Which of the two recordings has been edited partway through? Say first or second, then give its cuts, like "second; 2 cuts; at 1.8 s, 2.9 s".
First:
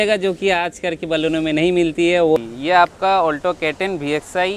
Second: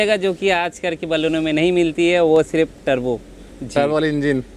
first; 1 cut; at 2.4 s